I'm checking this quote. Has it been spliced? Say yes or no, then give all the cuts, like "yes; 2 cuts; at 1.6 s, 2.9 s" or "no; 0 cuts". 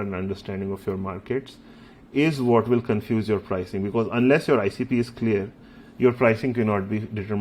no; 0 cuts